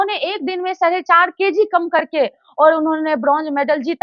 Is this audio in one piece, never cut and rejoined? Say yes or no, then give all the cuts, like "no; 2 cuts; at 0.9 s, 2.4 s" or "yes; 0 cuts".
yes; 0 cuts